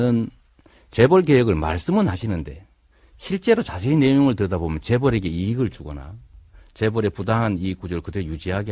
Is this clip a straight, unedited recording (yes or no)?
yes